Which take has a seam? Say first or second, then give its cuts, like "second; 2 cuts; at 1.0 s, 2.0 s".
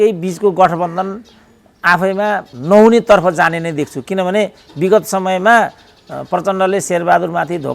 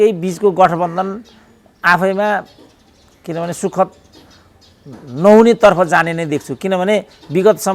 first; 1 cut; at 2.5 s